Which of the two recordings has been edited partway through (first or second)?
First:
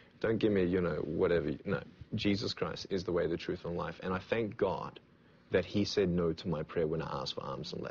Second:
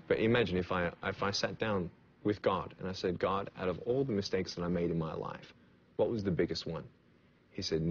second